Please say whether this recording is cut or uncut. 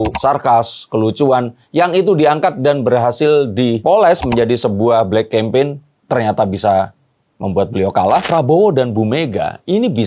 cut